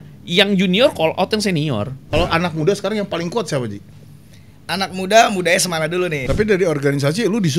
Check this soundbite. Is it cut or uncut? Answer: cut